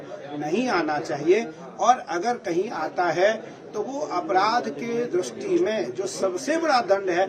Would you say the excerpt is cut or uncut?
uncut